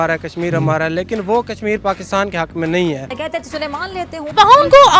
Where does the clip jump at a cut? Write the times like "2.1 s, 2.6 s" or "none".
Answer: 3.6 s